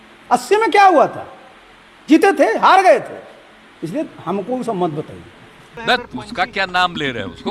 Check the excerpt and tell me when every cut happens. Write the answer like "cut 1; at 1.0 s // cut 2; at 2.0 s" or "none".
cut 1; at 5.6 s